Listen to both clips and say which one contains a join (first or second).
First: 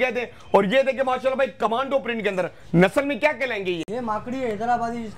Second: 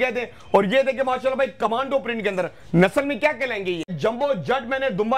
second